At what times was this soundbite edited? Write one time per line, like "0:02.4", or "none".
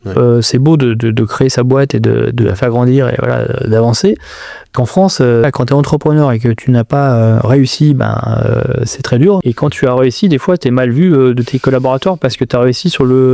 0:05.4
0:09.4